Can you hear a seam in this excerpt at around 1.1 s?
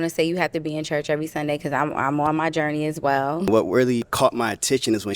no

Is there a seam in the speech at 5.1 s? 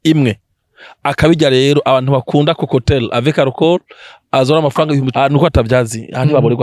yes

